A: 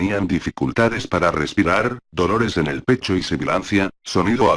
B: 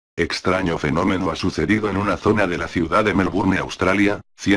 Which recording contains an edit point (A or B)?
A